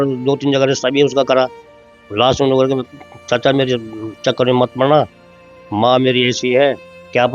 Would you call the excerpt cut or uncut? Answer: uncut